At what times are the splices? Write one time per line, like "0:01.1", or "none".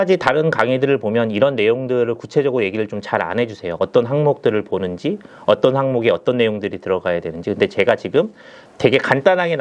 none